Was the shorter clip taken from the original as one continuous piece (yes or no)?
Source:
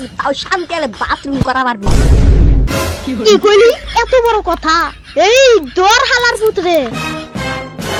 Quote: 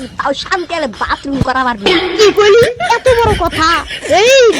no